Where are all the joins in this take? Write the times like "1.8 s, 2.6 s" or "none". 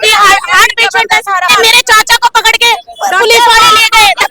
1.5 s